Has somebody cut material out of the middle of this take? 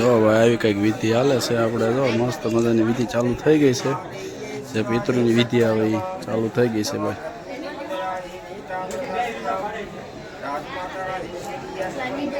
no; 0 cuts

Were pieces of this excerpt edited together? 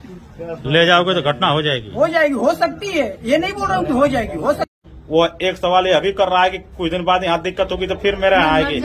yes; 1 cut; at 4.7 s

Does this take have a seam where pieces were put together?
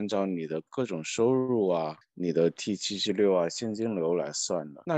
no; 0 cuts

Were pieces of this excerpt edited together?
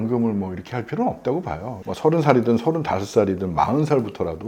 yes; 1 cut; at 1.9 s

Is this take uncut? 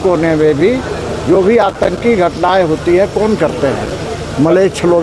yes; 0 cuts

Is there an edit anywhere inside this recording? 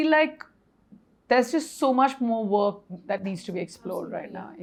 no; 0 cuts

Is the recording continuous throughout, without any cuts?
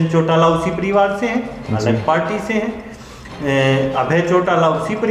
yes; 0 cuts

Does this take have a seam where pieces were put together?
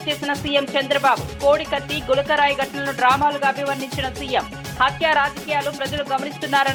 no; 0 cuts

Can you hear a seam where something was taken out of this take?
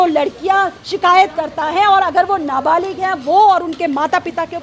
no; 0 cuts

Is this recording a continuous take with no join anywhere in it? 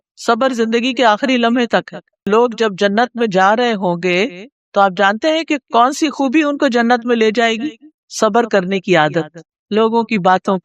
no; 1 cut; at 2.3 s

